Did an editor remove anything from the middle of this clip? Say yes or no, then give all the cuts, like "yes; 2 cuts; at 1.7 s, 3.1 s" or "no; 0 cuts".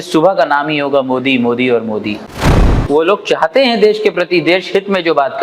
yes; 1 cut; at 2.4 s